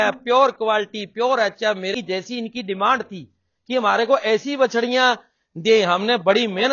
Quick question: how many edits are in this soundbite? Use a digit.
1